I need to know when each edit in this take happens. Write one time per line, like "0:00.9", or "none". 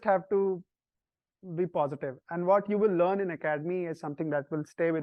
none